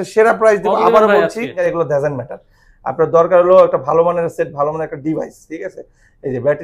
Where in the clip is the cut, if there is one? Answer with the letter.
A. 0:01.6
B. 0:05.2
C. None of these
A